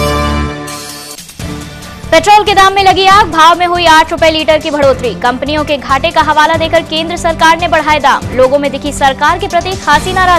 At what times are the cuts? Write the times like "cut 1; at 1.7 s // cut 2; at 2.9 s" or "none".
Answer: cut 1; at 1.0 s